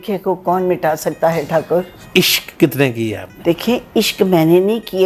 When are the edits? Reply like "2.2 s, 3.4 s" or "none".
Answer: 2.0 s